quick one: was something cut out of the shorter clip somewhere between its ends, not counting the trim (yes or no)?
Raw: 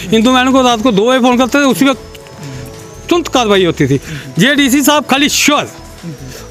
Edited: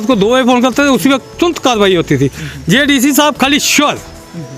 yes